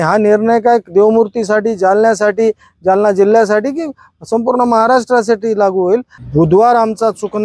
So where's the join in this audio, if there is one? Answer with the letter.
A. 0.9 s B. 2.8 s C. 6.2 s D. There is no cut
C